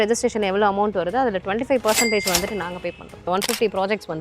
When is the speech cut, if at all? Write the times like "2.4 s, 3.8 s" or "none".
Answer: 3.3 s